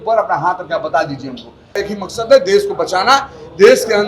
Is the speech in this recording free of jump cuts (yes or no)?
no